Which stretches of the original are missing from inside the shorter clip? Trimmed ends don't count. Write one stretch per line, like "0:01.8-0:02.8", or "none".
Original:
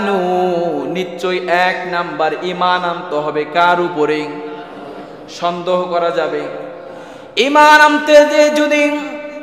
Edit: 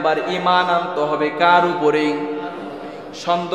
none